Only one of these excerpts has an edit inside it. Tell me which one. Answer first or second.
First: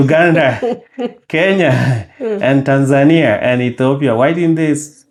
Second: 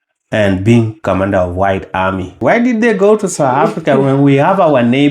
second